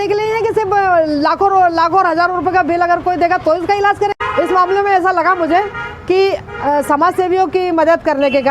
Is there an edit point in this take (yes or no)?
yes